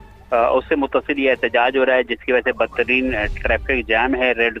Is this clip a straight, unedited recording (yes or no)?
yes